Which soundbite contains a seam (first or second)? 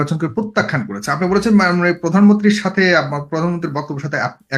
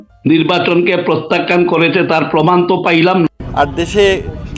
second